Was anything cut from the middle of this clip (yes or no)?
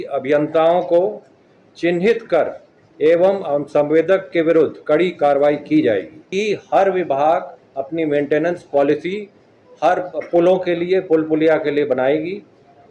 yes